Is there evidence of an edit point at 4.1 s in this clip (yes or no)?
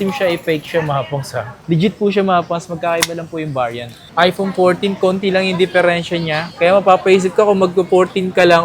yes